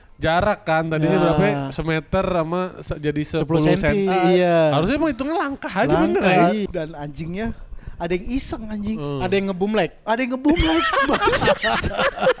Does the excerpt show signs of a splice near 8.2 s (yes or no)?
no